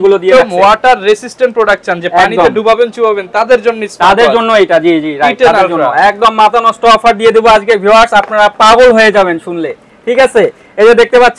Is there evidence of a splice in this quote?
no; 0 cuts

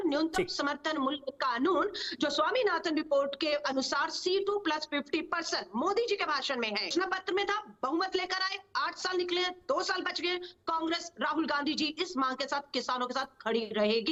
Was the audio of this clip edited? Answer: no; 0 cuts

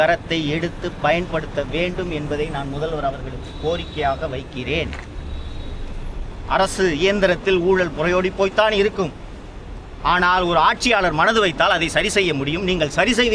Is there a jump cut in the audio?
no; 0 cuts

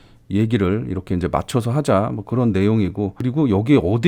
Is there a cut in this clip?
no; 0 cuts

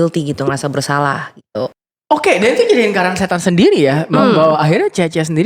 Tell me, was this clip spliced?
yes; 1 cut; at 1.9 s

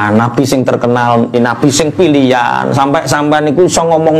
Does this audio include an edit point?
yes; 1 cut; at 1.4 s

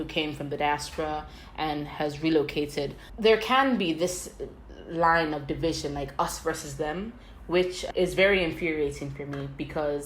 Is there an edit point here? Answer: yes; 1 cut; at 3.0 s

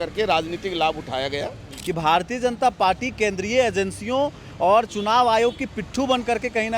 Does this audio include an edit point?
yes; 1 cut; at 1.7 s

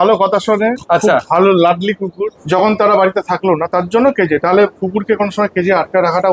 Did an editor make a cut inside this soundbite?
yes; 1 cut; at 2.4 s

